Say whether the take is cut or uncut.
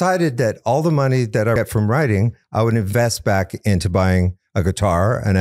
cut